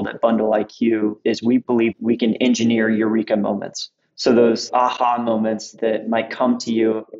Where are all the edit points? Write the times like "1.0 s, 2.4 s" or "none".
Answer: 4.6 s